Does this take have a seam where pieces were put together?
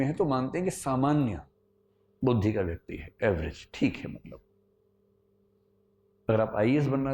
no; 0 cuts

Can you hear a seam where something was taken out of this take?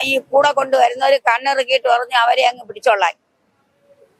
no; 0 cuts

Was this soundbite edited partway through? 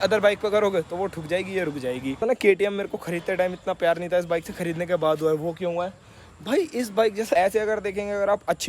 yes; 2 cuts; at 2.2 s, 7.4 s

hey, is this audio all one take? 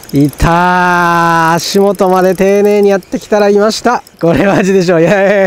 no; 1 cut; at 4.1 s

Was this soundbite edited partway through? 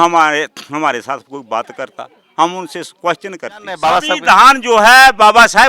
yes; 1 cut; at 3.8 s

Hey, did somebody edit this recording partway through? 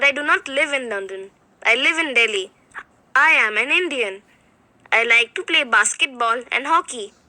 yes; 1 cut; at 6.0 s

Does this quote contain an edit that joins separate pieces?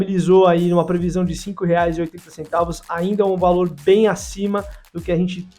no; 0 cuts

